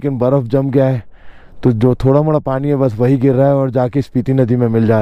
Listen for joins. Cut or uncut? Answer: uncut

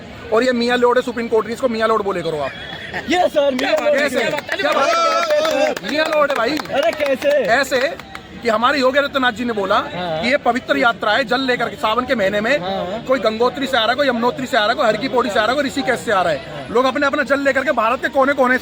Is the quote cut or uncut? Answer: uncut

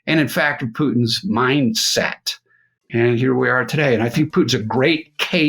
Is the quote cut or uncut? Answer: cut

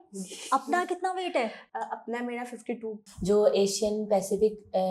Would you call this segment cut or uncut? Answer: cut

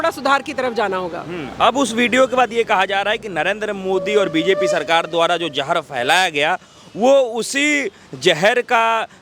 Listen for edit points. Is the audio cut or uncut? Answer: uncut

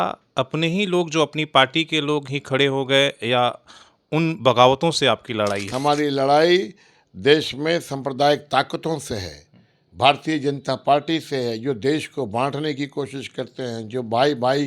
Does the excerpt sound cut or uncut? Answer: cut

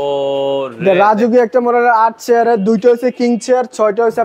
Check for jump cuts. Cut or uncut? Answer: uncut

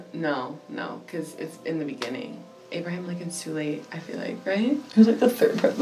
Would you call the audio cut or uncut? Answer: uncut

